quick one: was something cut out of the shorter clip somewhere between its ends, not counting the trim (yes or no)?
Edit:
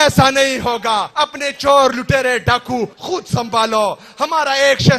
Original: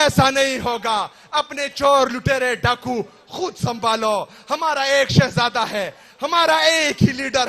yes